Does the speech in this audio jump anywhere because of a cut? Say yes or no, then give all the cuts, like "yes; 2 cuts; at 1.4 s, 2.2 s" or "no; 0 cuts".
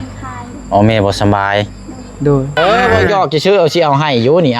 yes; 1 cut; at 2.5 s